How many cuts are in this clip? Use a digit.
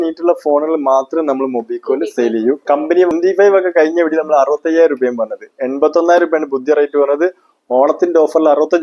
1